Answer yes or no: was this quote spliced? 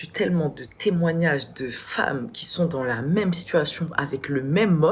no